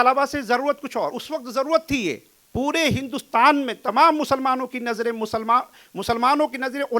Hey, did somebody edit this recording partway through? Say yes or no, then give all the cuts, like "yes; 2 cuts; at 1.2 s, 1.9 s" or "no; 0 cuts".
yes; 1 cut; at 2.3 s